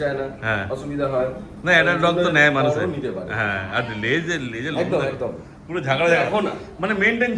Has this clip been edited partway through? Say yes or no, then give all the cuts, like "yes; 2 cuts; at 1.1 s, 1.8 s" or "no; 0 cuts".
no; 0 cuts